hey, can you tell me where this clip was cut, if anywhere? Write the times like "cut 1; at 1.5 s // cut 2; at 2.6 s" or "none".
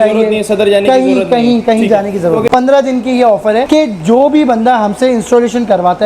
cut 1; at 2.5 s // cut 2; at 3.7 s